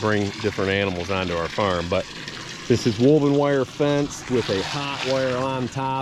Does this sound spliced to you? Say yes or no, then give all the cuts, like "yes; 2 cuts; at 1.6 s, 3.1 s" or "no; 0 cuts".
no; 0 cuts